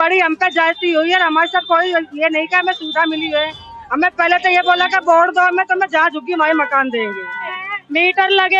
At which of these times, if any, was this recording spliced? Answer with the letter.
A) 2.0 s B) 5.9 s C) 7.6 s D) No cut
C